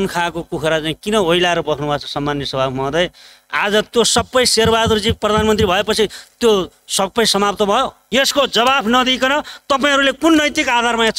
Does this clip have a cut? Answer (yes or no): yes